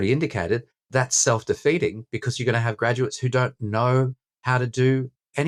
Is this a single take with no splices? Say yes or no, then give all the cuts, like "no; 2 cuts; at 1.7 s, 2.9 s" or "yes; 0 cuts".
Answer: yes; 0 cuts